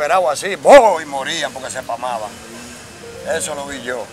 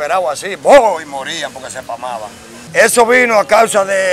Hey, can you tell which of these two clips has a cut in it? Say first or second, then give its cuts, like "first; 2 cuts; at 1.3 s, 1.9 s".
second; 1 cut; at 2.5 s